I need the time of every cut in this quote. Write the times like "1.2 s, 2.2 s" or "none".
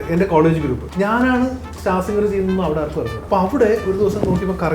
0.9 s, 3.2 s

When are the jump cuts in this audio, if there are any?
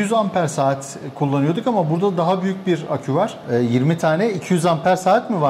3.4 s

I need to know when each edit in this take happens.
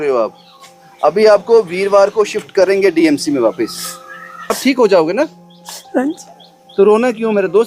4.6 s

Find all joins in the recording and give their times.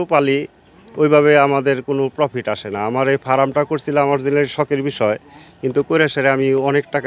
none

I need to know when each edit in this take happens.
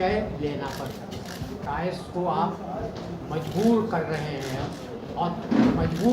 1.6 s

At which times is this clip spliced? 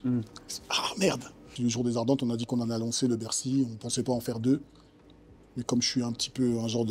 1.5 s

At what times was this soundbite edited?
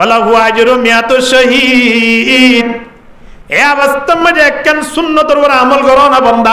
none

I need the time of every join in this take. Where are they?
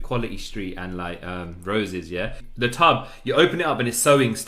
2.8 s

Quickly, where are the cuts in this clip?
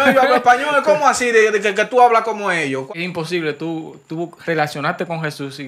2.8 s

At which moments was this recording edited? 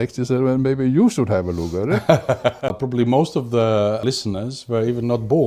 2.8 s, 4.0 s

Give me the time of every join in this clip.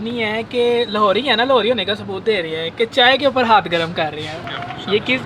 4.3 s

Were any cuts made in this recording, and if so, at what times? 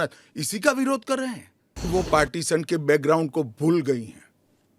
1.9 s

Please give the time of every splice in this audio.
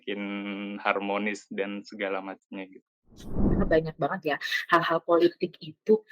3.4 s

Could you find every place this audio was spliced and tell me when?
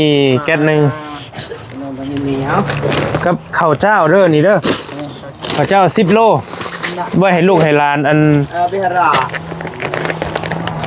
none

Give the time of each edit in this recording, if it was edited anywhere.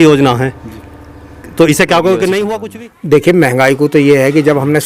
2.6 s

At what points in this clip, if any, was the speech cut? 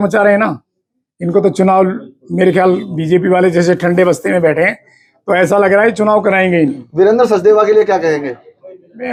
none

